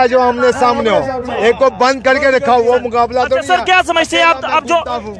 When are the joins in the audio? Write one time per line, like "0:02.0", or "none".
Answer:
none